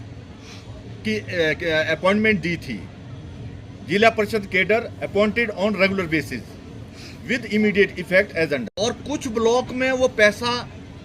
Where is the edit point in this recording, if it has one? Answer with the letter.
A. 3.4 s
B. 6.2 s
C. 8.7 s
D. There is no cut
C